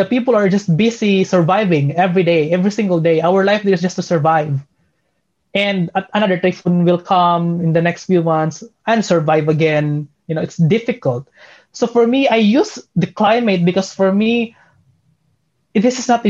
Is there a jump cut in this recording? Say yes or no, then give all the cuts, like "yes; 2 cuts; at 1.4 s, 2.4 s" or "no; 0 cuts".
no; 0 cuts